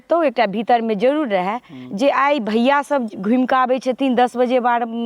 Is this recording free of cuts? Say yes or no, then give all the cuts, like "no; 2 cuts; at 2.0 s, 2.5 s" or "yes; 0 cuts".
yes; 0 cuts